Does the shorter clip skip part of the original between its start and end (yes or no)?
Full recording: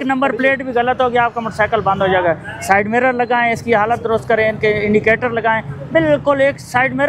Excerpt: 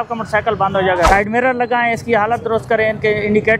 yes